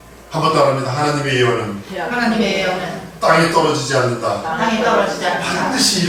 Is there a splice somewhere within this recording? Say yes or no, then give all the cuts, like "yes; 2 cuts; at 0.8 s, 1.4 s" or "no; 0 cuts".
no; 0 cuts